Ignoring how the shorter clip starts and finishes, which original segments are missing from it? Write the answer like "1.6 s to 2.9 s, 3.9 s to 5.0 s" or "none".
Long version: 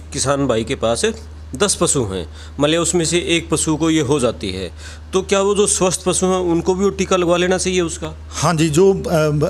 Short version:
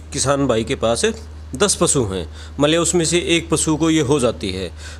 none

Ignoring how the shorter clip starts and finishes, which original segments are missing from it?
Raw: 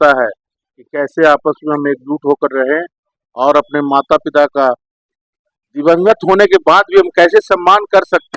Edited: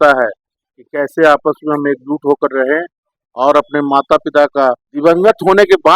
4.9 s to 5.7 s

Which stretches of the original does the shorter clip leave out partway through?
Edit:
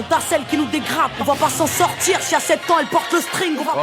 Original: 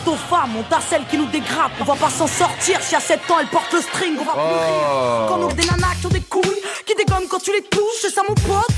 none

